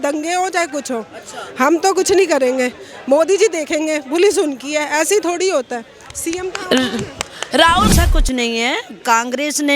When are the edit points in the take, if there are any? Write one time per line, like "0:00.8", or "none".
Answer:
0:07.9